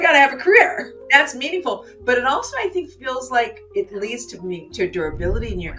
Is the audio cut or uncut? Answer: cut